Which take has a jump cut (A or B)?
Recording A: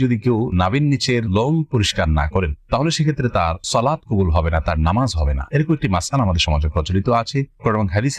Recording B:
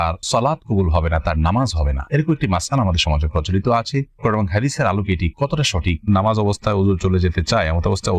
B